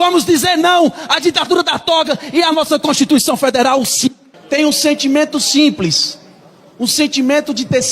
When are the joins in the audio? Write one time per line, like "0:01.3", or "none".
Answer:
0:04.3

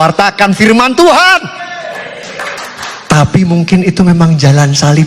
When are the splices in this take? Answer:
0:02.6

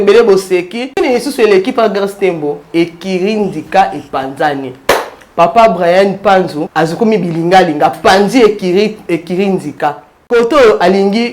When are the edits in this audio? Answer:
0:01.0
0:06.6
0:10.1

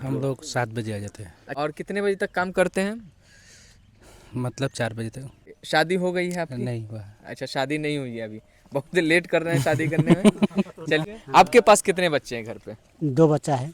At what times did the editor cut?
0:01.4
0:05.5
0:11.2

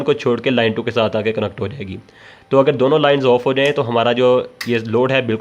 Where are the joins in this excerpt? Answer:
none

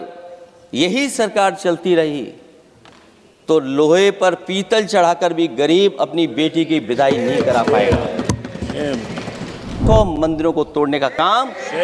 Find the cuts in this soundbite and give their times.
0:09.8

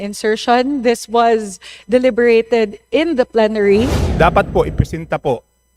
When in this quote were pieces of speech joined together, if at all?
0:04.0

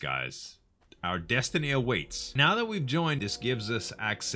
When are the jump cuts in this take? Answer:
0:02.3
0:03.2

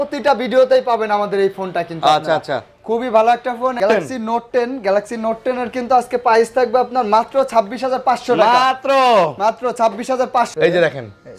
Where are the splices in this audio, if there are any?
0:03.8
0:10.5

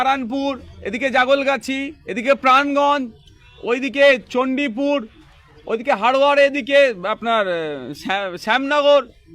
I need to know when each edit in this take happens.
none

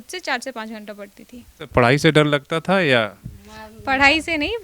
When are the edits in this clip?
0:01.7

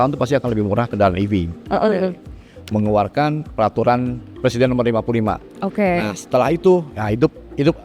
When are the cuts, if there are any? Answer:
0:00.9
0:02.5

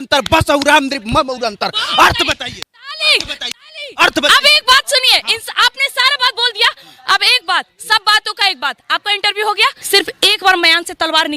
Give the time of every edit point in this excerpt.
0:09.8

